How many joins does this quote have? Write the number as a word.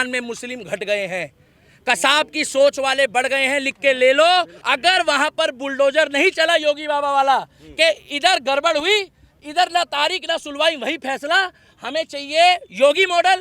one